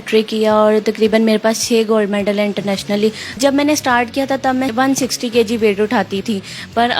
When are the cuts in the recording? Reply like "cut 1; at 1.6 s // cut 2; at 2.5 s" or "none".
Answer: cut 1; at 3.4 s // cut 2; at 4.7 s // cut 3; at 6.2 s